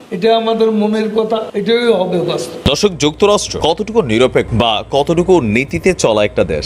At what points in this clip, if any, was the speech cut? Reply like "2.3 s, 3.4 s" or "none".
1.5 s, 2.6 s